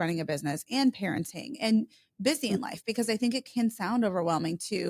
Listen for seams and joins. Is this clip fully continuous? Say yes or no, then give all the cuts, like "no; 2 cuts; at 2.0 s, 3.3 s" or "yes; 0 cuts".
yes; 0 cuts